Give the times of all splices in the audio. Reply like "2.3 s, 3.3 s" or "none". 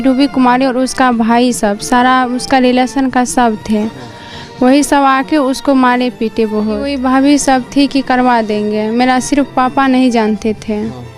6.9 s